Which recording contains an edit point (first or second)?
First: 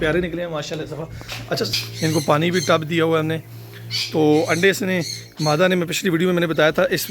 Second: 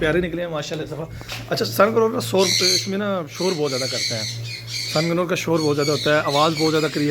first